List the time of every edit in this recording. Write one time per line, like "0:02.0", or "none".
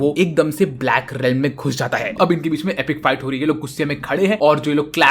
0:02.1